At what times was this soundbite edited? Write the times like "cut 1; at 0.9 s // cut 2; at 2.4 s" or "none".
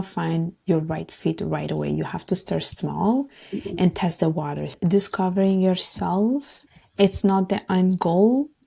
cut 1; at 4.7 s // cut 2; at 6.6 s